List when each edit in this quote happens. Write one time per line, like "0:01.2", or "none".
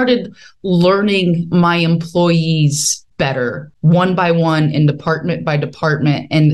0:03.3